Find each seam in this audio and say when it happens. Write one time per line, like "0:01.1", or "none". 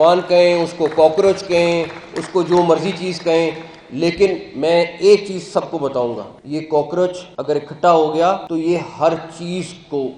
0:06.3
0:07.3
0:08.4